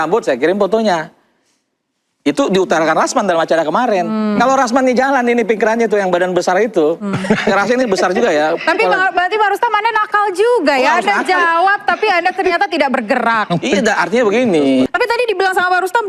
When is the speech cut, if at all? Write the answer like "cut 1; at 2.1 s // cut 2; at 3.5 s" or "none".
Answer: cut 1; at 14.9 s